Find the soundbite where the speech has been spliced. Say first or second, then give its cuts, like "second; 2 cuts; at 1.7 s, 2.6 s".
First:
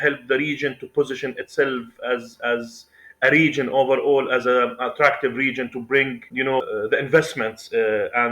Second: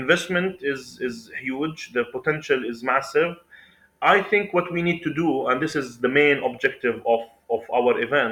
first; 1 cut; at 6.7 s